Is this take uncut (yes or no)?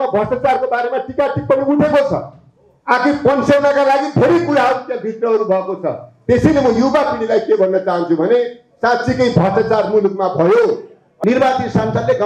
no